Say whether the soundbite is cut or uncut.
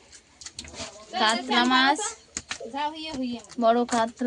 uncut